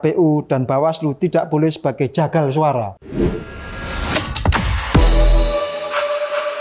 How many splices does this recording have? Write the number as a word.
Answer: one